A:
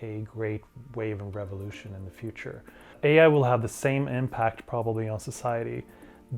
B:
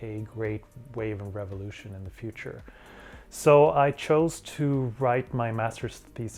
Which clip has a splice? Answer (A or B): A